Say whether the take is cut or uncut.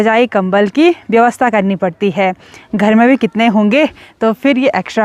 uncut